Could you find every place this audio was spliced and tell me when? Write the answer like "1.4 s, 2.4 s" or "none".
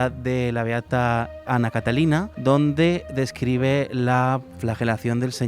2.3 s